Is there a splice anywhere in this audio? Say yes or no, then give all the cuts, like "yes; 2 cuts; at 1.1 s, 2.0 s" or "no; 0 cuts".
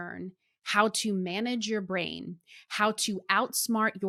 no; 0 cuts